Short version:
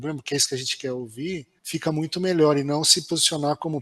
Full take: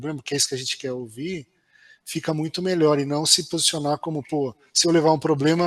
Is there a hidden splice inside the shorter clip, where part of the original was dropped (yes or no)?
yes